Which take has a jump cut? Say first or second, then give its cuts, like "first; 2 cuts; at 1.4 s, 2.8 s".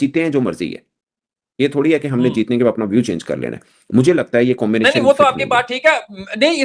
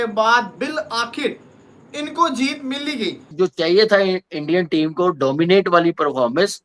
second; 1 cut; at 3.2 s